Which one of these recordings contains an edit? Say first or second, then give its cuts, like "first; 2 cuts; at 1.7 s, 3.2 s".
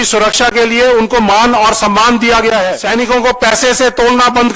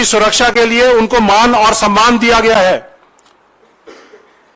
first; 1 cut; at 2.8 s